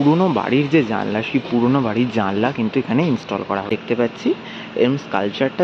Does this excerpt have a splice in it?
yes; 1 cut; at 3.7 s

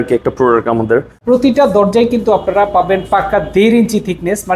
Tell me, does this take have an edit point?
yes; 1 cut; at 1.2 s

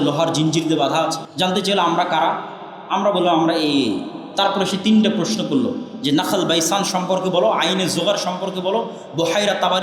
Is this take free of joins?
no; 1 cut; at 1.2 s

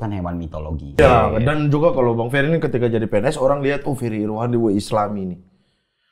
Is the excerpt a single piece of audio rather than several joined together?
no; 1 cut; at 1.0 s

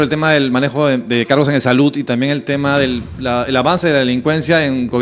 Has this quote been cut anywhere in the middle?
no; 0 cuts

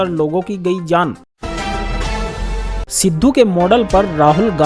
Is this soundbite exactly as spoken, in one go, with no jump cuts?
no; 1 cut; at 1.3 s

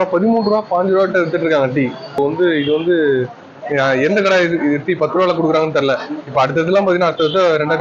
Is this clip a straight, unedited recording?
no; 1 cut; at 2.2 s

